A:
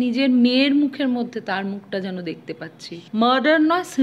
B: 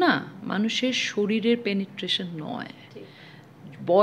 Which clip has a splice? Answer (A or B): A